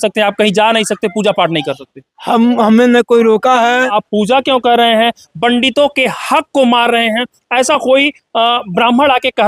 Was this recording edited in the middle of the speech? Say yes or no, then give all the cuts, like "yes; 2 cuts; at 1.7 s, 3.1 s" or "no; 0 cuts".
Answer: yes; 1 cut; at 4.0 s